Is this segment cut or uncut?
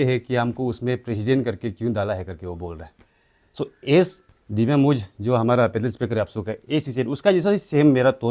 uncut